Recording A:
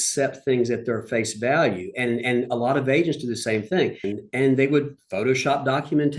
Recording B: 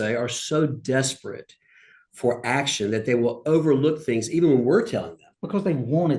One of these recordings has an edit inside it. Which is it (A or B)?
A